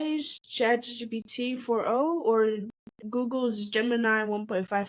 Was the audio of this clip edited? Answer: no; 0 cuts

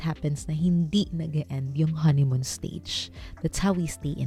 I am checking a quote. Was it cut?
no; 0 cuts

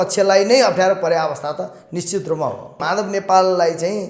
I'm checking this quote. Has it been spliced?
yes; 1 cut; at 2.8 s

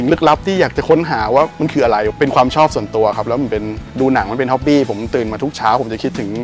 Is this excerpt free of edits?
no; 2 cuts; at 2.1 s, 3.8 s

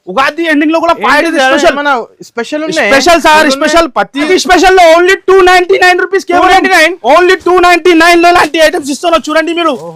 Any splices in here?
yes; 1 cut; at 4.3 s

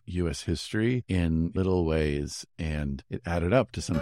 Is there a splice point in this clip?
yes; 2 cuts; at 1.5 s, 3.1 s

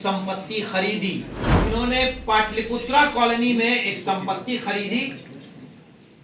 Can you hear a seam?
yes; 1 cut; at 1.4 s

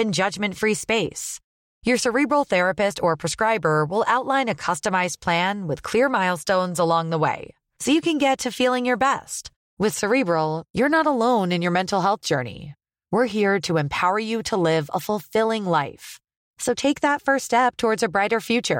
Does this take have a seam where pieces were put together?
no; 0 cuts

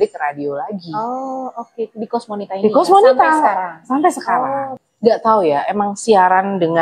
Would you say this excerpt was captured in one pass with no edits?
no; 1 cut; at 4.8 s

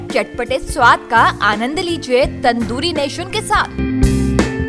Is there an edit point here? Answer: no; 0 cuts

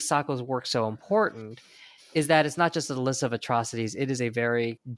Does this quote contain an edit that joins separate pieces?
no; 0 cuts

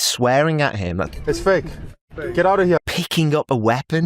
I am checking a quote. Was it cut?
yes; 2 cuts; at 1.0 s, 2.8 s

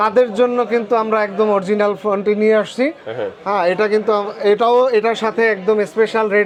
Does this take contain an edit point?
no; 0 cuts

